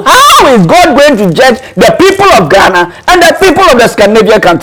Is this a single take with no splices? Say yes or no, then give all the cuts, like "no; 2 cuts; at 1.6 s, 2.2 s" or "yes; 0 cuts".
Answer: yes; 0 cuts